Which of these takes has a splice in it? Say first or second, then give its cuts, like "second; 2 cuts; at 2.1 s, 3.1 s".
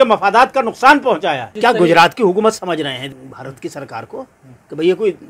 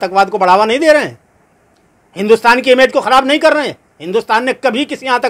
first; 2 cuts; at 1.5 s, 3.1 s